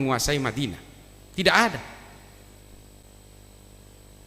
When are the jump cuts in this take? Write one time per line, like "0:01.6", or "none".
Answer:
none